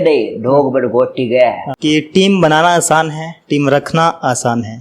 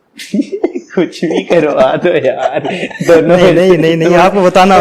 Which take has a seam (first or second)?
first